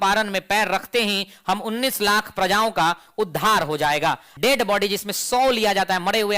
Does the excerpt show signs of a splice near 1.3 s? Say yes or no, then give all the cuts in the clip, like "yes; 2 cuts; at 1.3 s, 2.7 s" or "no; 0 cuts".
no; 1 cut; at 4.3 s